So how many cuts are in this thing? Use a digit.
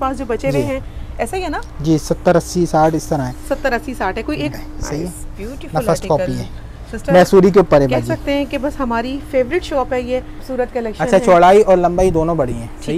2